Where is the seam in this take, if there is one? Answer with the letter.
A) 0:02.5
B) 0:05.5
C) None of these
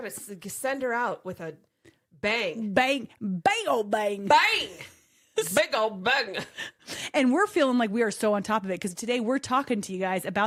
C